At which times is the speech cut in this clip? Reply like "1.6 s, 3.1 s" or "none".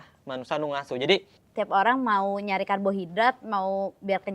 1.4 s